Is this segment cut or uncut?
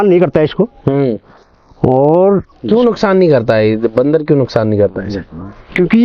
uncut